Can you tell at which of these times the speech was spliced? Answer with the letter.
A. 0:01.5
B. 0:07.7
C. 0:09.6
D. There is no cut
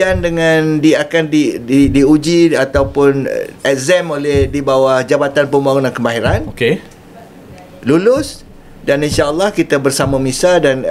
D